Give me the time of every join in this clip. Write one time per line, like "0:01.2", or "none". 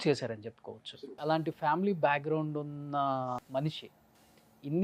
0:01.2
0:03.4